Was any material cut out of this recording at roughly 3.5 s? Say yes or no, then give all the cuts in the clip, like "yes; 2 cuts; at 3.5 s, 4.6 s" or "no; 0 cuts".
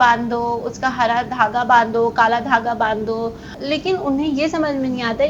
yes; 1 cut; at 3.5 s